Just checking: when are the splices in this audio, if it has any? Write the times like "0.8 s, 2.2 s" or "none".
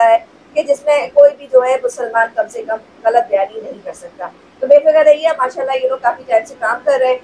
none

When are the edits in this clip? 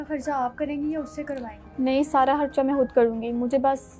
none

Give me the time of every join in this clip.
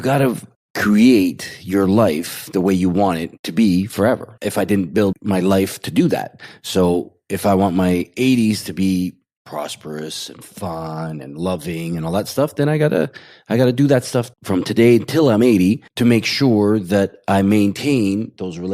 9.3 s, 15.9 s

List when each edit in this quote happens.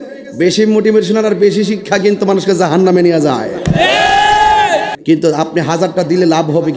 4.9 s

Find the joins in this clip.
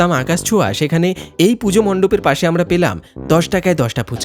none

